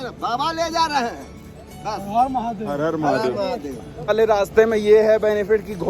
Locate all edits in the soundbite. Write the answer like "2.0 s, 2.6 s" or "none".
4.1 s

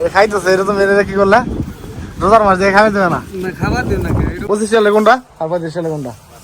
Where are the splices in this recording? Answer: 4.4 s

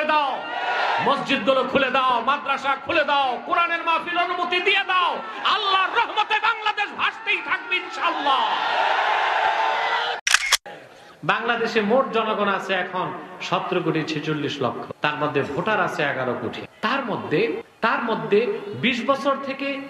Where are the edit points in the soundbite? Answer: 10.5 s, 14.9 s, 16.7 s, 17.7 s

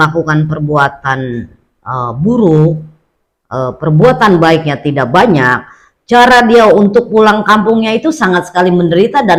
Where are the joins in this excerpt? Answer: none

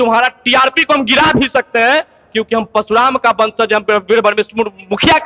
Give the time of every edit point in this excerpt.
none

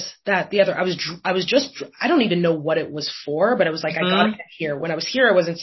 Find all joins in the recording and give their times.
none

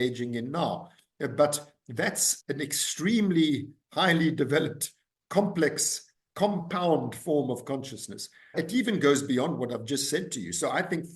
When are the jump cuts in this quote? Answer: 2.3 s, 8.5 s

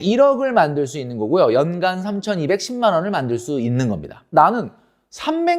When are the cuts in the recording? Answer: 4.3 s

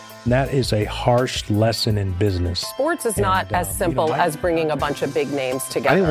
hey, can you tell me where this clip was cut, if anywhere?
none

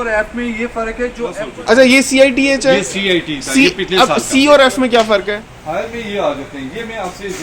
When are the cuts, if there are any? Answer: 1.4 s, 5.5 s

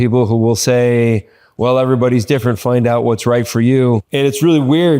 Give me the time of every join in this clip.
4.1 s

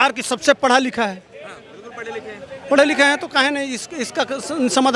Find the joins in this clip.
none

